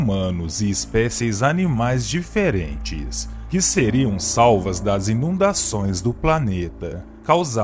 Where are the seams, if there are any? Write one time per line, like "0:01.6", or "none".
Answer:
0:01.9